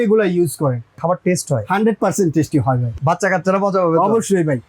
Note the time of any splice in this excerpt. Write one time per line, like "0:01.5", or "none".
0:01.0
0:02.9